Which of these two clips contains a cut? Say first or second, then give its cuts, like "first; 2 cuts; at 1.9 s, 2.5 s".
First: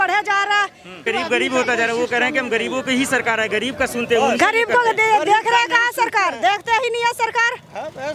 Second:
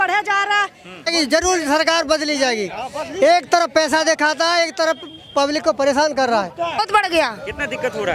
second; 2 cuts; at 1.1 s, 6.8 s